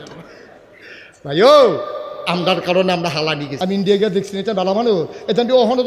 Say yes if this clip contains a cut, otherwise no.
yes